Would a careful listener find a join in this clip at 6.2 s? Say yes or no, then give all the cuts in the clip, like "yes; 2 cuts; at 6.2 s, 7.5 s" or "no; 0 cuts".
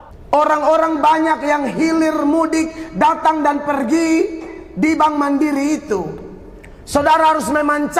no; 0 cuts